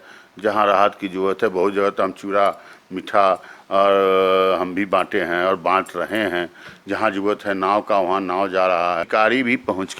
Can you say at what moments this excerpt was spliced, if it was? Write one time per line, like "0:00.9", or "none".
0:09.0